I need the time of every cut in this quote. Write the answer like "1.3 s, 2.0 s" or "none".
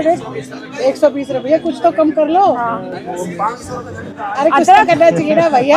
none